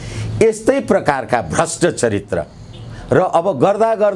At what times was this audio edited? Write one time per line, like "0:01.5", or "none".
none